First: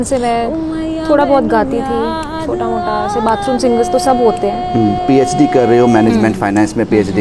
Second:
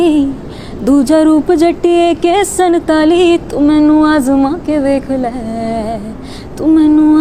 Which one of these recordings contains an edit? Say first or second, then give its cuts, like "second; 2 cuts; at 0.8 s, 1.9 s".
first; 1 cut; at 5.0 s